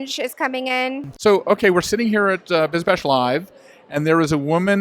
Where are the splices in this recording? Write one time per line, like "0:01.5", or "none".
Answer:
0:01.2